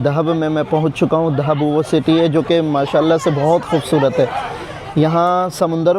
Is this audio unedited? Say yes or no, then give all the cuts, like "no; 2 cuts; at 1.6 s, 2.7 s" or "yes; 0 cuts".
yes; 0 cuts